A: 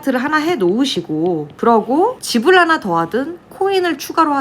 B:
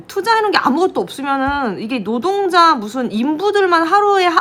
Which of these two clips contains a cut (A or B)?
A